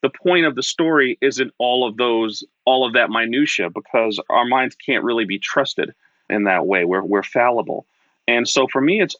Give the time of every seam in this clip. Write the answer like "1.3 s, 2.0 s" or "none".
4.2 s, 6.3 s